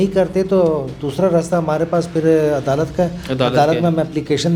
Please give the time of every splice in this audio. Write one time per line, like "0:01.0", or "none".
none